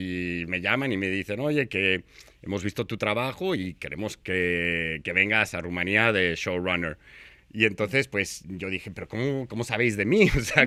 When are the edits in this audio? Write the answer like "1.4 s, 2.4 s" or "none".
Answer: none

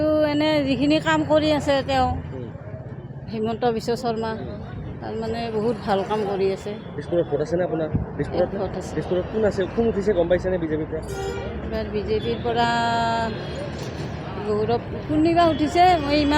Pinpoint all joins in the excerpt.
none

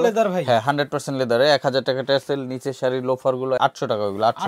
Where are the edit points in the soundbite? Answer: 3.6 s

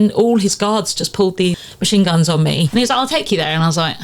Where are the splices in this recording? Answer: 1.7 s, 2.7 s

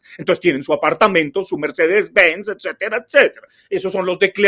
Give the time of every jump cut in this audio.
none

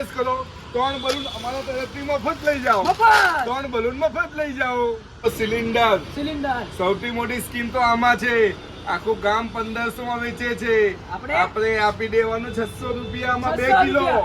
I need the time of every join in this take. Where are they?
5.2 s

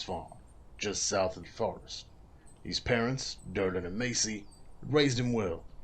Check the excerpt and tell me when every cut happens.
1.4 s

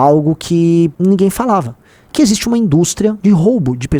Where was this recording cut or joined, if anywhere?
1.0 s, 3.2 s

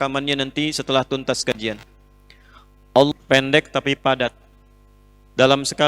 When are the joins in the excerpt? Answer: 3.1 s

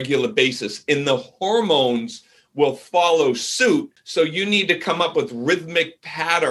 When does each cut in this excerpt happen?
4.0 s

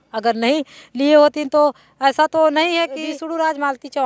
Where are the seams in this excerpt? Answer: 3.1 s

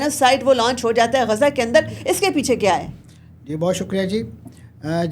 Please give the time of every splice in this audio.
none

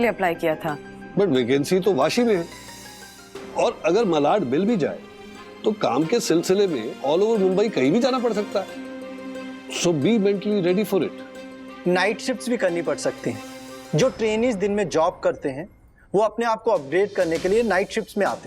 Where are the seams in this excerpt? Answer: none

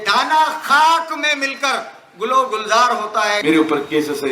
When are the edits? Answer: 3.4 s

